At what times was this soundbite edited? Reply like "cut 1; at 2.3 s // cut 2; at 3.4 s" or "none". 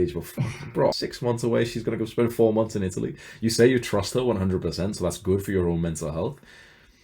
cut 1; at 0.9 s